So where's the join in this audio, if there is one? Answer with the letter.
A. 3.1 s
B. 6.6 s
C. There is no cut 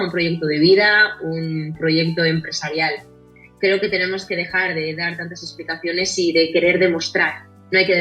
C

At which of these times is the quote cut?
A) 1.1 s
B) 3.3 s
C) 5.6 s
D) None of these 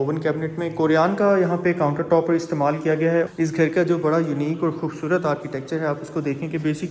B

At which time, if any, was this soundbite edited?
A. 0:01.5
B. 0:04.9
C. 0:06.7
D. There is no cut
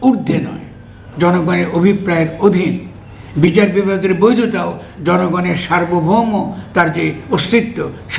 D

